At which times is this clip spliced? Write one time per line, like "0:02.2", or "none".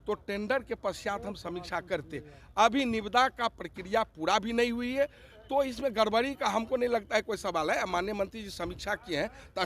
none